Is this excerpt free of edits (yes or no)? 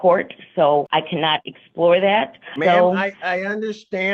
no